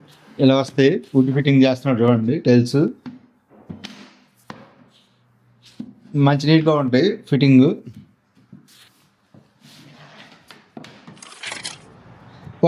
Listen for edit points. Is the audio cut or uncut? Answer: cut